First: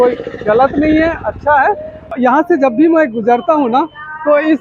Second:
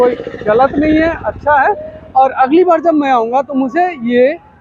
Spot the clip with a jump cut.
first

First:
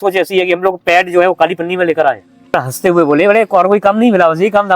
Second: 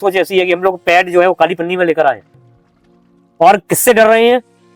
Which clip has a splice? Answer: first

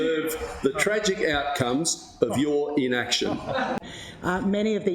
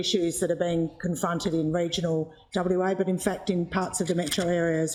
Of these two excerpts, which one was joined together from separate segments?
first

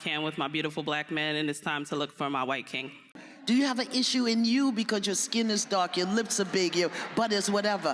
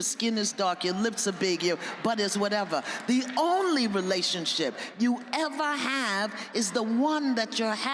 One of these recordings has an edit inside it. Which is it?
first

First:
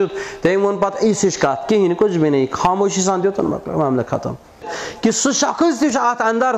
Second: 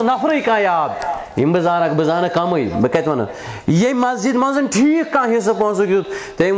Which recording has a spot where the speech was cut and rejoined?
first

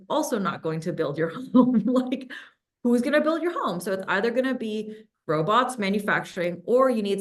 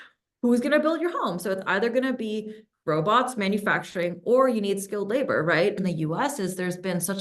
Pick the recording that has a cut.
second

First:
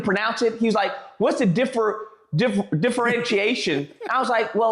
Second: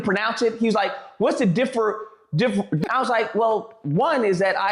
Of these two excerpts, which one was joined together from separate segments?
second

